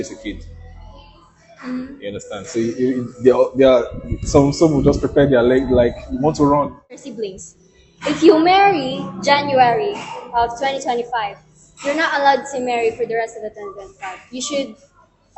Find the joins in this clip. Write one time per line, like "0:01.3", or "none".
0:07.0